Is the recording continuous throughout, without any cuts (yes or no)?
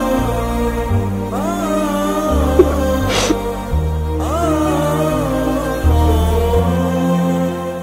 yes